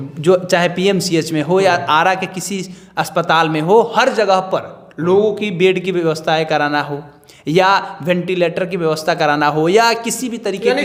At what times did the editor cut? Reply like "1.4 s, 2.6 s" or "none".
none